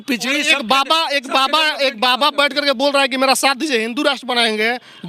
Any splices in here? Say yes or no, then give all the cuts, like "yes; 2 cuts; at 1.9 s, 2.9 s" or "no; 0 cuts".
no; 0 cuts